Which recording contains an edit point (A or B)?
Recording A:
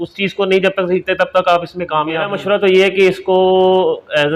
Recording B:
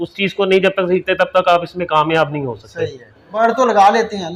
A